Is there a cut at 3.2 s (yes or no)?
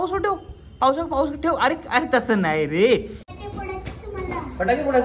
yes